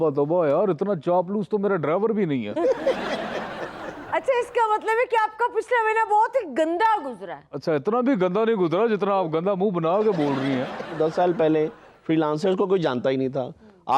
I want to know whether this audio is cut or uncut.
cut